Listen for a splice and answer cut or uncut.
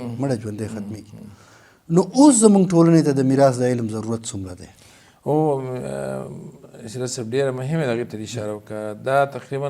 uncut